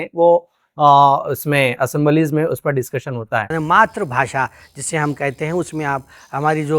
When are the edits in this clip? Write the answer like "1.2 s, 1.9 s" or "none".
3.5 s